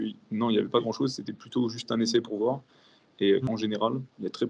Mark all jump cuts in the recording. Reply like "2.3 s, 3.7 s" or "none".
3.4 s